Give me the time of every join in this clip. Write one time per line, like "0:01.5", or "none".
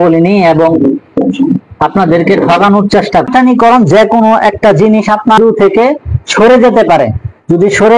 0:03.3
0:05.4

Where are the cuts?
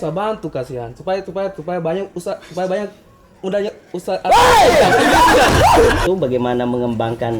0:06.0

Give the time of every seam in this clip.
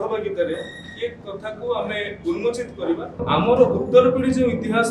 0:03.2

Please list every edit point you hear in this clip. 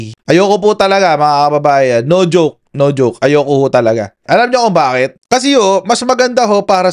none

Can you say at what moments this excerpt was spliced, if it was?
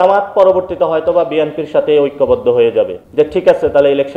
0:03.0

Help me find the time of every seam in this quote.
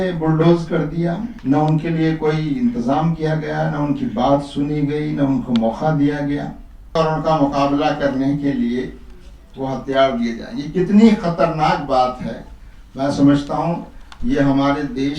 0:01.3
0:06.9

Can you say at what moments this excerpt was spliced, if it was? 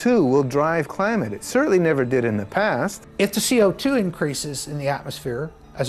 0:03.0

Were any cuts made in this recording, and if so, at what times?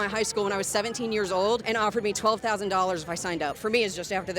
0:01.6
0:03.6

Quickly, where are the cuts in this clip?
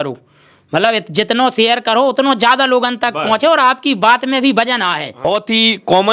0:05.2

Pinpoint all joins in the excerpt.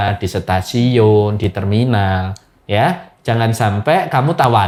none

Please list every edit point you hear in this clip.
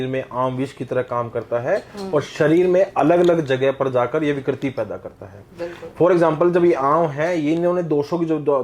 none

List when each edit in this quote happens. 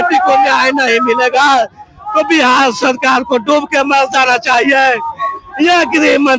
none

